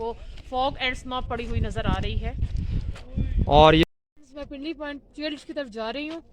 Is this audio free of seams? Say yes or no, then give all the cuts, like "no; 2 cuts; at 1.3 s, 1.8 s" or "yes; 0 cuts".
no; 1 cut; at 3.9 s